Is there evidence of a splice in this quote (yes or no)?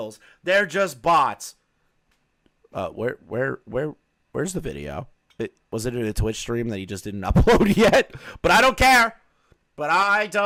no